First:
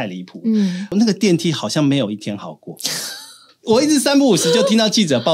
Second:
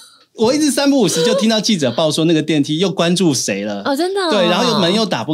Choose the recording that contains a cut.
first; 1 cut; at 0.9 s

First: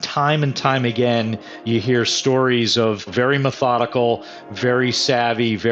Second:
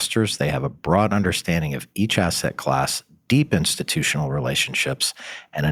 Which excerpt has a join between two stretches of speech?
first; 1 cut; at 3.0 s

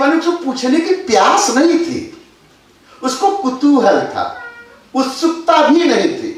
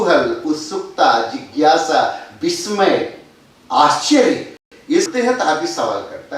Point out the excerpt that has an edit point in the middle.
second; 2 cuts; at 0.8 s, 4.7 s

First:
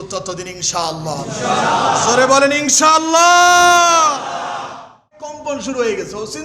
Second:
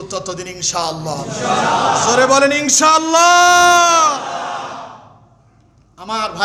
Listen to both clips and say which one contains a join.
first; 1 cut; at 5.4 s

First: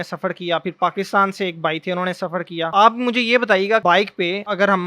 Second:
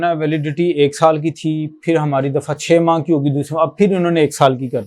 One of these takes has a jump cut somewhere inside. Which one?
first; 2 cuts; at 2.7 s, 3.9 s

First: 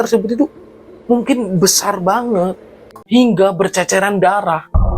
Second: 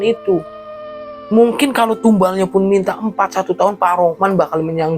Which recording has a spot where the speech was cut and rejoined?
first; 1 cut; at 2.9 s

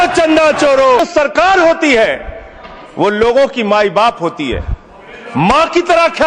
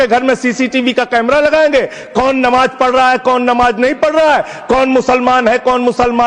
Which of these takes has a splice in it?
first; 1 cut; at 1.0 s

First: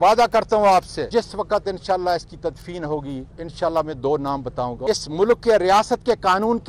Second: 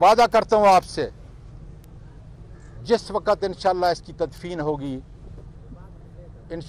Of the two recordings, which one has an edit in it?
first; 3 cuts; at 1.1 s, 3.4 s, 4.8 s

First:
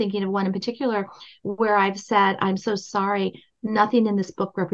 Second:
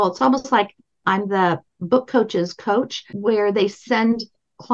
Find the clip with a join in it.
second; 2 cuts; at 1.2 s, 3.1 s

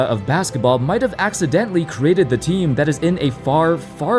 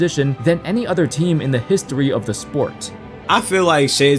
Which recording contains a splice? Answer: second; 1 cut; at 3.2 s

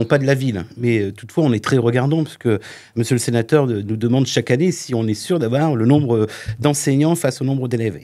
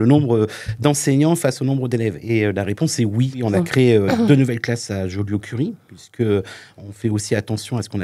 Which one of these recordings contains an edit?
second; 1 cut; at 3.4 s

